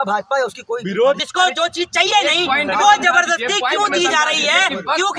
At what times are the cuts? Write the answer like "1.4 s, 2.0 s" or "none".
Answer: none